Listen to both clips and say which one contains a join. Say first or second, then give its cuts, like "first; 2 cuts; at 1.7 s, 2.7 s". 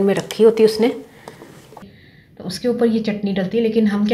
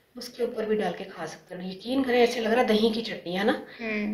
first; 1 cut; at 1.8 s